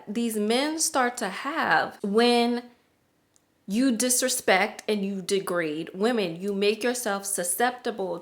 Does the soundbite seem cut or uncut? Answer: cut